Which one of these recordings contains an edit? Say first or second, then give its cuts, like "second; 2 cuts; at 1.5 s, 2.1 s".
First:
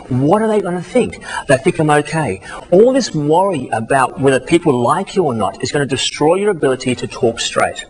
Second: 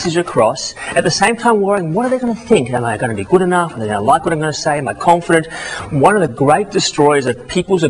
first; 1 cut; at 1.3 s